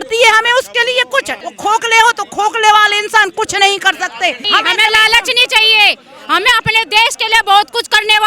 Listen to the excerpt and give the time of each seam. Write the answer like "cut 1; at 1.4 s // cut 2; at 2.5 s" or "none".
cut 1; at 1.4 s // cut 2; at 4.4 s

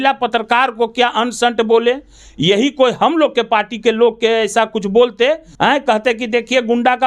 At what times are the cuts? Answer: cut 1; at 5.5 s

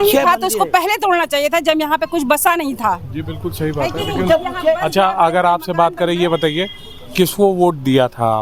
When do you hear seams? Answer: none

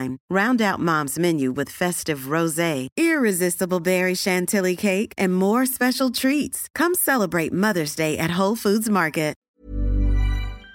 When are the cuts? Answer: cut 1; at 9.4 s

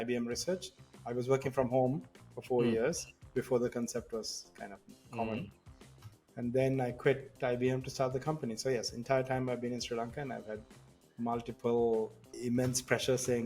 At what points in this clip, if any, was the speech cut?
cut 1; at 12.3 s

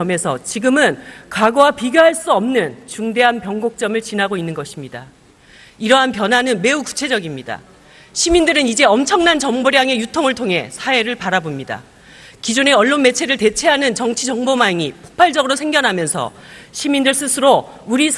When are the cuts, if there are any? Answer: none

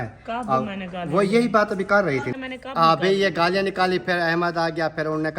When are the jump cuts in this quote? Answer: cut 1; at 2.3 s

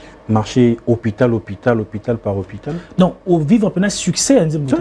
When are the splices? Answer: none

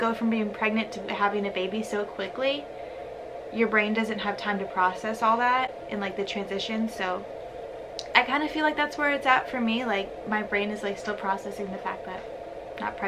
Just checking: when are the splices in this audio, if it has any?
none

